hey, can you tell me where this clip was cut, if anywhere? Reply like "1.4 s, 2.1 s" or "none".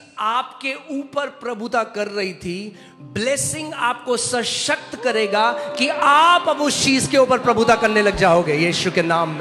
none